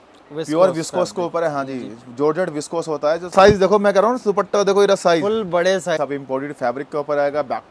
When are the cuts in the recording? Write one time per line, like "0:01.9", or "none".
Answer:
0:03.3
0:06.0